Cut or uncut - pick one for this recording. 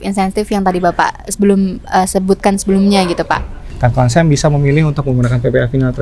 cut